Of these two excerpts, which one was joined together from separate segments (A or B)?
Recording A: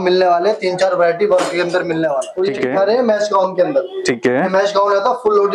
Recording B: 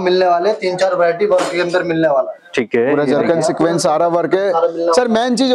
A